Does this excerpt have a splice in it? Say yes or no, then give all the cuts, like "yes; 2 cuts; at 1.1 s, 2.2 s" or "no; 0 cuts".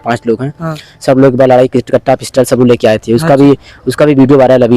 no; 0 cuts